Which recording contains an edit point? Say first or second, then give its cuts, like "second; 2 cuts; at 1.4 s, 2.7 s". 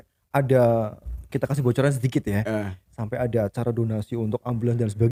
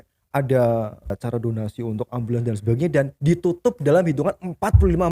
second; 1 cut; at 1.2 s